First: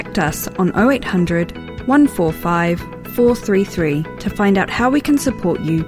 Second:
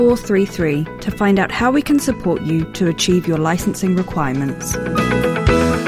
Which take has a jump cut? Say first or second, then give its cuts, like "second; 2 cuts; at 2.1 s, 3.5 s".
second; 1 cut; at 4.7 s